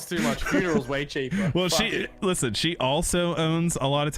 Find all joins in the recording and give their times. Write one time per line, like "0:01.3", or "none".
none